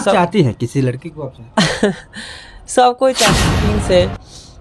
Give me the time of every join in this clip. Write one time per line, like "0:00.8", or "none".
0:03.4